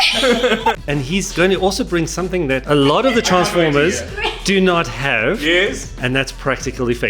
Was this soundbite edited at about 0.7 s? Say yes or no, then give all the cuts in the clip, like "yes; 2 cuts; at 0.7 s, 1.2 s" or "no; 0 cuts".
yes; 2 cuts; at 0.7 s, 2.6 s